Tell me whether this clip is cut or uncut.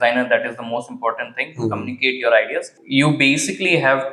cut